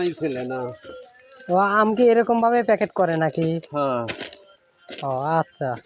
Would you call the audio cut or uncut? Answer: uncut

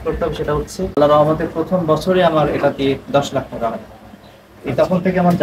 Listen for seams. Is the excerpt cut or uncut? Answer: cut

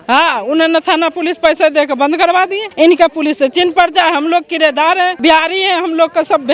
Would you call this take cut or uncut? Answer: cut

